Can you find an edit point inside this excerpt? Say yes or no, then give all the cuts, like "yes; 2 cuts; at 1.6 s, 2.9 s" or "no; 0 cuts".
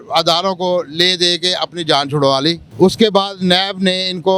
yes; 1 cut; at 2.6 s